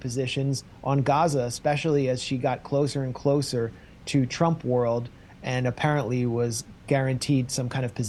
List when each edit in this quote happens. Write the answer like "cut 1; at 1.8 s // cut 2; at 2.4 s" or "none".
none